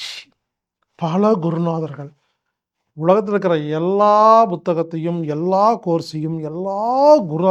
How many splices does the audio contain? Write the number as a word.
zero